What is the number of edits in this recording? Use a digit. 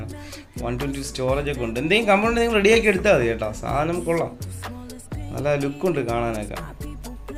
0